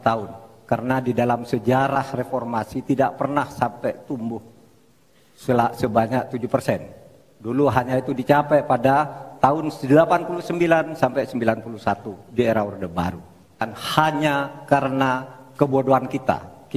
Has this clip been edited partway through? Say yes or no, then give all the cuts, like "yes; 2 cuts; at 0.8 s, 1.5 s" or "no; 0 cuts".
yes; 1 cut; at 13.8 s